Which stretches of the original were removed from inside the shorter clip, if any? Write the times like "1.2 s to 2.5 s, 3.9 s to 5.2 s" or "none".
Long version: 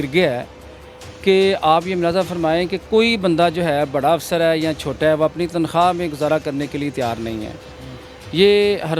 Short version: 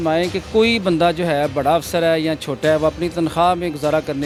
none

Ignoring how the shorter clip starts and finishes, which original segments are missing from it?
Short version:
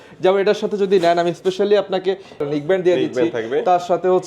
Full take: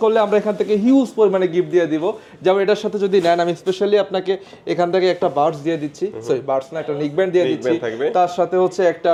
4.5 s to 6.8 s

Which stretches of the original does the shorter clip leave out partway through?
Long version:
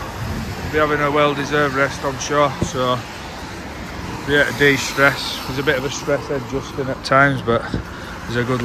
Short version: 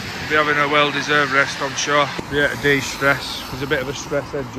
2.6 s to 4.2 s

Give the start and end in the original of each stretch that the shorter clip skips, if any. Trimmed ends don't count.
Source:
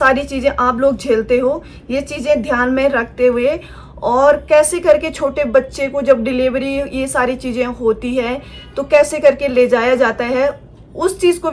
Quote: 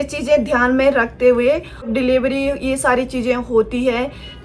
3.9 s to 6.2 s

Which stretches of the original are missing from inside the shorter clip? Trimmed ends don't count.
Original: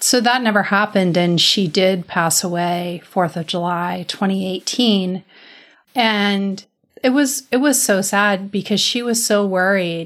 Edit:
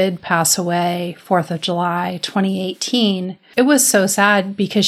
5.3 s to 7.4 s

